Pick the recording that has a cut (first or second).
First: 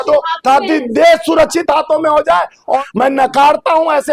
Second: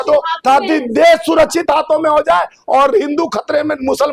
first